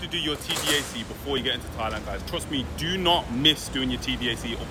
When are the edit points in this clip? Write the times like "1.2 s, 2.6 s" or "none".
none